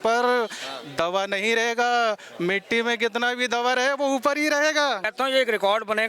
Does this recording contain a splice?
yes; 1 cut; at 5.1 s

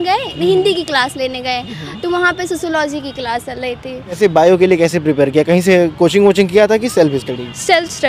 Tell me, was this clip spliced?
yes; 1 cut; at 4.2 s

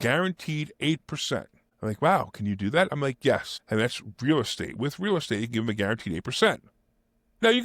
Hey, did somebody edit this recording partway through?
yes; 2 cuts; at 1.6 s, 3.5 s

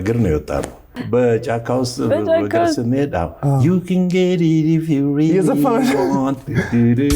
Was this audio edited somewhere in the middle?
yes; 1 cut; at 0.9 s

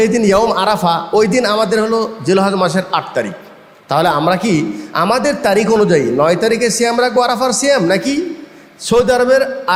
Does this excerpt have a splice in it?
no; 0 cuts

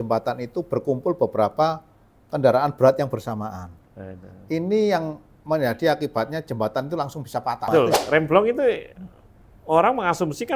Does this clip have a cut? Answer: yes; 1 cut; at 7.7 s

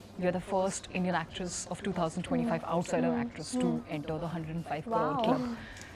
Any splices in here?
no; 0 cuts

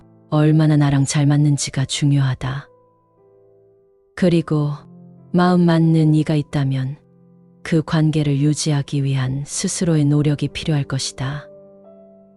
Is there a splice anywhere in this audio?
yes; 3 cuts; at 2.7 s, 4.1 s, 11.4 s

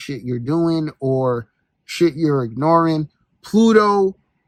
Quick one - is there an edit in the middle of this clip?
no; 0 cuts

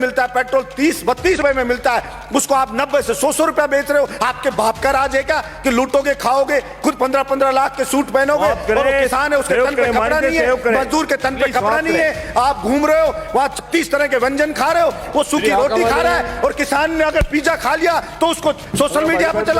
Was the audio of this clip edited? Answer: yes; 1 cut; at 1.4 s

